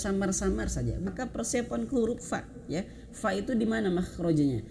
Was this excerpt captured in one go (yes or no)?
no